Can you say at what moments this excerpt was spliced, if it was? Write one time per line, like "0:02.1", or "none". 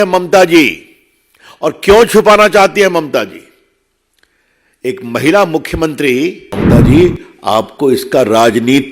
0:06.5